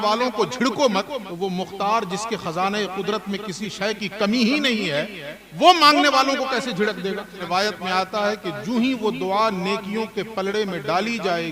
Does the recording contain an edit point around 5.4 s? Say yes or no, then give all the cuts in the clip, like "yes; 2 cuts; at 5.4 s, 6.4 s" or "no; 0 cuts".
no; 2 cuts; at 1.3 s, 7.4 s